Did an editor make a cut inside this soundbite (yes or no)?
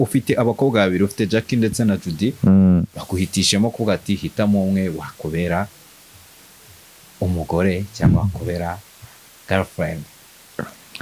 no